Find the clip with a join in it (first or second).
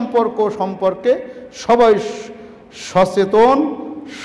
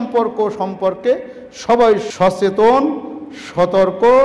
second